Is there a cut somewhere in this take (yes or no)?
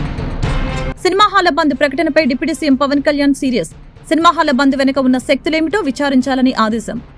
yes